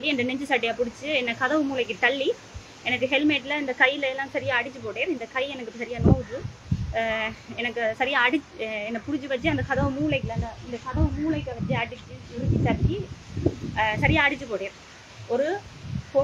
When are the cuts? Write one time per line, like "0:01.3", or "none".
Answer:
none